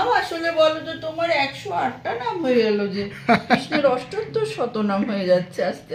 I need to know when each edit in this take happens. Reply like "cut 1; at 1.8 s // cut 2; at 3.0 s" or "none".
none